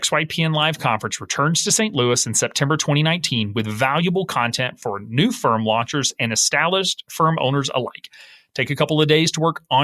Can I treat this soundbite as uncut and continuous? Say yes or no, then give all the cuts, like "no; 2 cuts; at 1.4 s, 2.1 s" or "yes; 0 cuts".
no; 1 cut; at 7.0 s